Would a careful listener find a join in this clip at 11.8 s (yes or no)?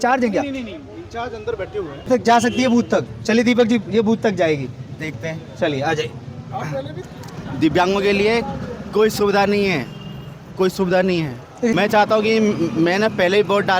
yes